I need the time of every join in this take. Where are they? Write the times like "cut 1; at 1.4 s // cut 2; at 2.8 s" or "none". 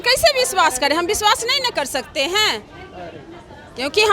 none